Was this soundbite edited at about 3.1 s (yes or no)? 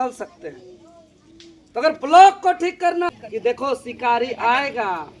yes